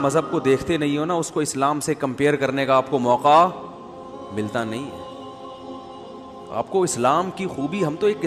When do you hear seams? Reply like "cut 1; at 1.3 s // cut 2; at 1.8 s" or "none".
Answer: none

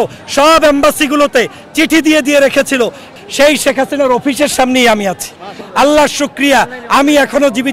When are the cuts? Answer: cut 1; at 3.1 s // cut 2; at 5.6 s

